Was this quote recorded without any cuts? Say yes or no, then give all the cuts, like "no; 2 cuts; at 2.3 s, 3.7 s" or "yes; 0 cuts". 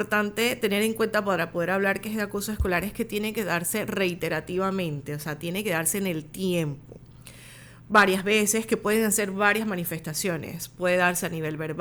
yes; 0 cuts